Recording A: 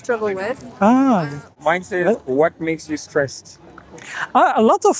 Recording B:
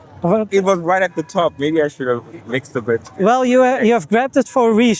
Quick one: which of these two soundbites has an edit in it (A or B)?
A